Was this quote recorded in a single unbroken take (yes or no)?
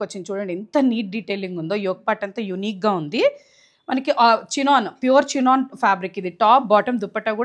yes